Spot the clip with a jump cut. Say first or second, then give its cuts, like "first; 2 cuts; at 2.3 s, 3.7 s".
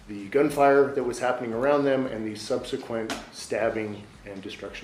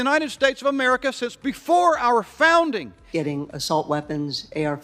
second; 1 cut; at 3.0 s